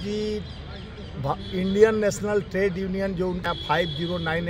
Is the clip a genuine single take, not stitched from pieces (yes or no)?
no